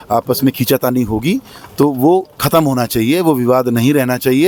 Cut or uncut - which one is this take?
uncut